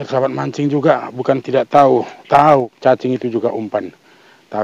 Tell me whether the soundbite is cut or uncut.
cut